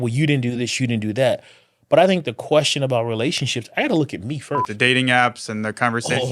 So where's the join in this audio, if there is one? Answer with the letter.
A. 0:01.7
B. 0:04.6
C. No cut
B